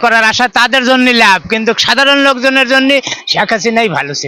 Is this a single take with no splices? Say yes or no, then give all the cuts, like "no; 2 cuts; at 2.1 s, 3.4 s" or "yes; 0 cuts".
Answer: yes; 0 cuts